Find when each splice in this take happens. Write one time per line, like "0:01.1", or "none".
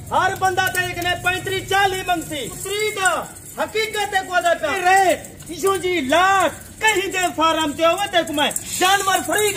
0:02.6
0:04.8